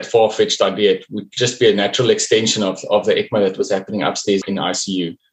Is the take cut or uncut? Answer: cut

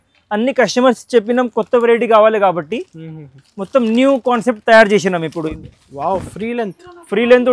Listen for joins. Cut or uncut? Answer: cut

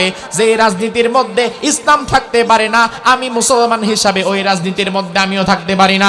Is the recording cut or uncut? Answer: uncut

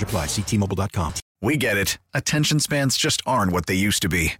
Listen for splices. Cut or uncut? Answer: cut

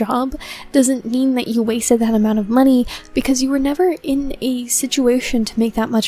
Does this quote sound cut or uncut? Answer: uncut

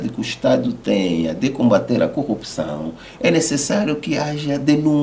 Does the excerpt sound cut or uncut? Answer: uncut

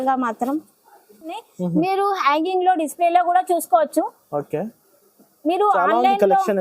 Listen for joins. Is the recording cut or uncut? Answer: cut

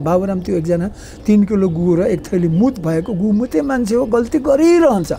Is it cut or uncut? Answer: uncut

